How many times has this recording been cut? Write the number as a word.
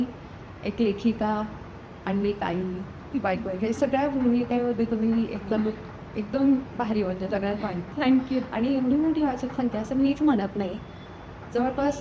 zero